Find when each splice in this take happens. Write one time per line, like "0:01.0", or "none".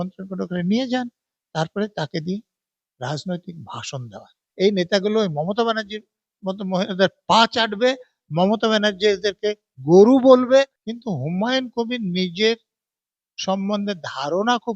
0:04.4
0:10.8